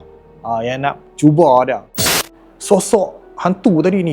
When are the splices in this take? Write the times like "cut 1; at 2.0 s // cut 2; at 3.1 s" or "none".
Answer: cut 1; at 2.0 s